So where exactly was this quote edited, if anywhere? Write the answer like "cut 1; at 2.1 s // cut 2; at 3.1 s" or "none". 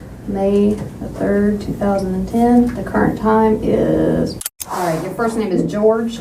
cut 1; at 4.4 s